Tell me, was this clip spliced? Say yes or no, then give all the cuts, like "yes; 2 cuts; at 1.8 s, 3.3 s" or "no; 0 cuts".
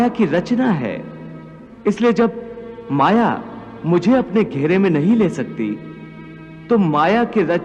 no; 0 cuts